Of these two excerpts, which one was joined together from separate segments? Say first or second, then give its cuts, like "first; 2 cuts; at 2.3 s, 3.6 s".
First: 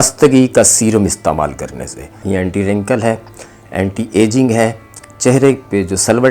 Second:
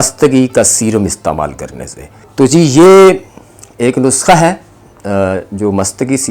first; 1 cut; at 2.2 s